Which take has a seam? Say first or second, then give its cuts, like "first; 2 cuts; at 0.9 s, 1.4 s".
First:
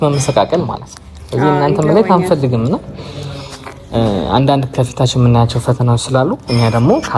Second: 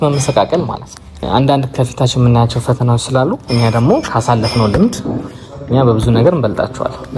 second; 1 cut; at 1.2 s